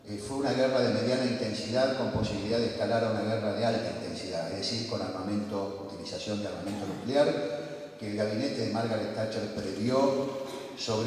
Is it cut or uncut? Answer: cut